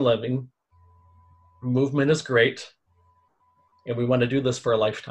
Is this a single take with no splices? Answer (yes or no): yes